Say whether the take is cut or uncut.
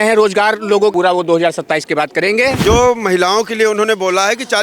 cut